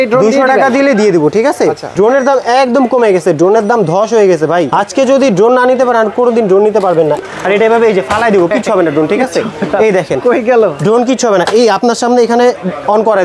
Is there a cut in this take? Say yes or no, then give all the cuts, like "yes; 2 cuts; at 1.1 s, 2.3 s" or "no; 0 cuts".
yes; 2 cuts; at 1.9 s, 7.2 s